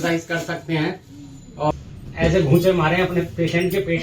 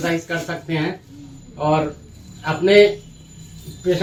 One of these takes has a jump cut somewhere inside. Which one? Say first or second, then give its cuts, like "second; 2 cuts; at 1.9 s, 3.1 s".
first; 1 cut; at 1.7 s